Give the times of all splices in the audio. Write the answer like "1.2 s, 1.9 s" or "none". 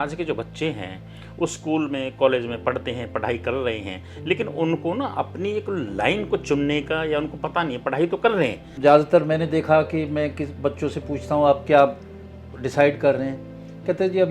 8.7 s

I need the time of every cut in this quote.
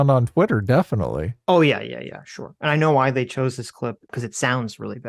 4.1 s

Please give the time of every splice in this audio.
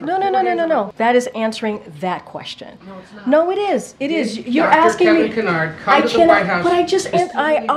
0.9 s

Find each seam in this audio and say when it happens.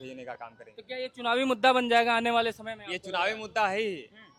none

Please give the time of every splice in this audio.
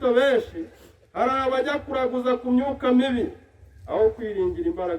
none

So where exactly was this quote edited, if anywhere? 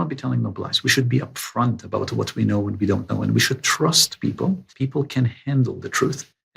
4.7 s

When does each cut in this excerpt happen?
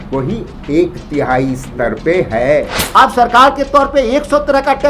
2.8 s

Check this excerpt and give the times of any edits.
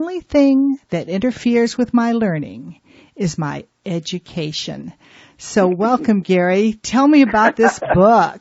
none

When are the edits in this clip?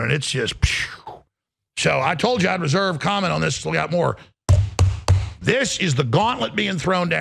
none

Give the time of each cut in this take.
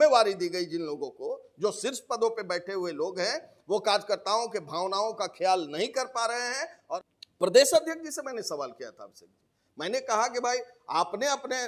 6.8 s

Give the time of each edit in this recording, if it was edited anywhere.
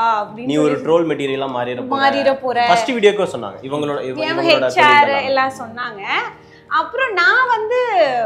none

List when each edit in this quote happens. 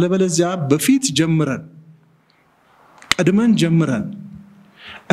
none

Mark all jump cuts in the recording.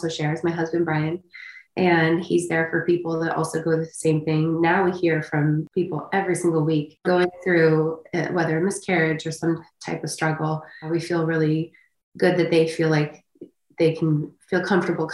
5.7 s, 6.9 s, 10.9 s

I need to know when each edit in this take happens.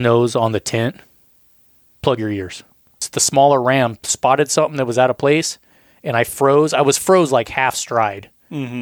3.0 s

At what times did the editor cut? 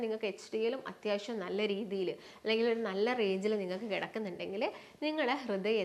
none

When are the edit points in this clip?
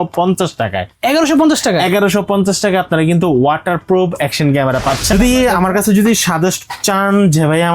5.1 s

